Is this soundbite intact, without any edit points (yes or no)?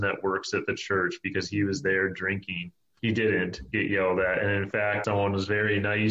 no